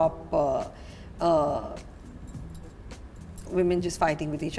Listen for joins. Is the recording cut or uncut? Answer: uncut